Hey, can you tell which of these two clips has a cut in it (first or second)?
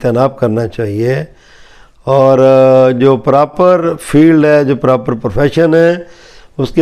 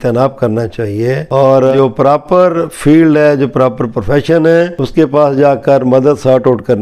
second